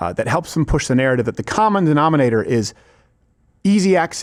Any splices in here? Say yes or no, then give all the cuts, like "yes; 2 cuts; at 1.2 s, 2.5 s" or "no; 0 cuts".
no; 0 cuts